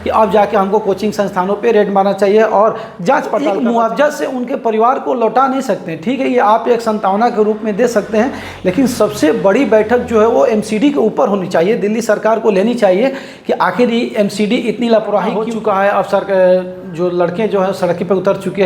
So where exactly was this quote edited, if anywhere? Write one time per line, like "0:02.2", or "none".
0:03.5
0:15.5